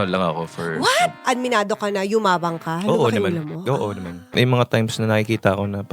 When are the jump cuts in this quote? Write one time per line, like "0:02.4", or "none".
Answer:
0:01.2
0:04.3